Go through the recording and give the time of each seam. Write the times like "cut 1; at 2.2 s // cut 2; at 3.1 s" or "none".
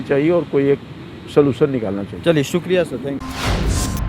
none